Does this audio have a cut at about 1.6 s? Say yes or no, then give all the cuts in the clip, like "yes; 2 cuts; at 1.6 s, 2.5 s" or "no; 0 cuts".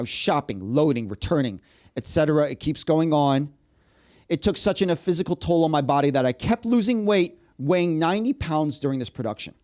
no; 0 cuts